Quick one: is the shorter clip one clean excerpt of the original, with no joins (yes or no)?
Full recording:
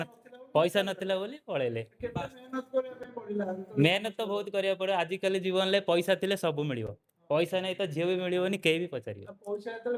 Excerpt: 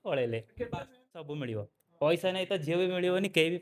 no